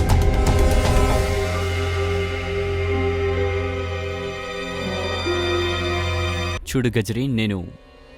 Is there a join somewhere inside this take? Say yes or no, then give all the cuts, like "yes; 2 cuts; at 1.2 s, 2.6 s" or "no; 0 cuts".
yes; 1 cut; at 6.6 s